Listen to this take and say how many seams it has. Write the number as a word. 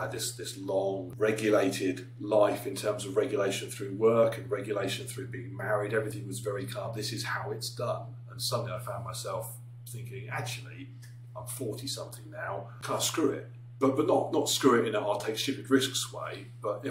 two